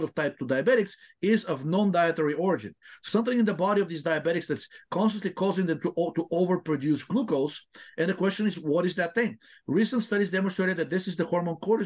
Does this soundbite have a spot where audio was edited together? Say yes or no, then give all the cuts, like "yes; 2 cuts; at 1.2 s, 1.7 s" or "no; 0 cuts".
yes; 1 cut; at 3.0 s